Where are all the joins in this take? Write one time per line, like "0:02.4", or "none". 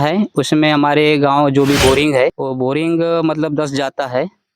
0:02.4